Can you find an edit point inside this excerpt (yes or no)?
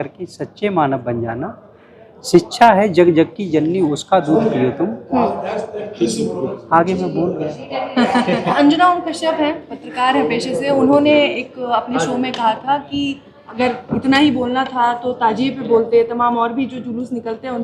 yes